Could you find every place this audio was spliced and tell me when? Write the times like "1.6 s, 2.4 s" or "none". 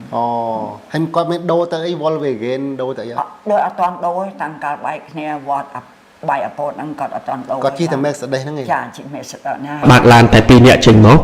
9.8 s